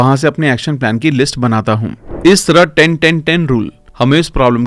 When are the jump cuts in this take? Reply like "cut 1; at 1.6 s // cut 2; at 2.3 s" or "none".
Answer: cut 1; at 2.0 s